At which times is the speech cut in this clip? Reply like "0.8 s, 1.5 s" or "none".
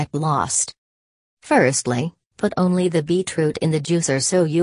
3.7 s